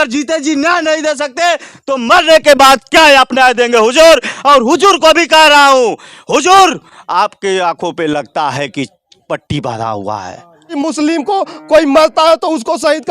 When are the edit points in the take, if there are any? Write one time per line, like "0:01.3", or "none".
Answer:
0:10.8